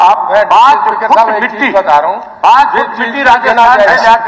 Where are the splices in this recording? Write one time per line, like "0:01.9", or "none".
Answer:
none